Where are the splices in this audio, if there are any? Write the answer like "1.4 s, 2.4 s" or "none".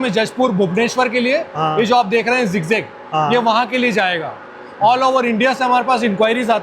none